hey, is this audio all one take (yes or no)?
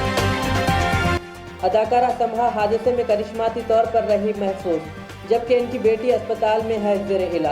no